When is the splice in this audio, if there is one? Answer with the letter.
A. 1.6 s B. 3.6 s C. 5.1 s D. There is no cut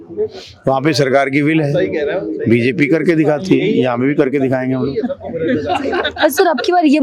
D